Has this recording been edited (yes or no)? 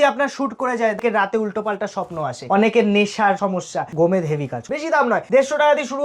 yes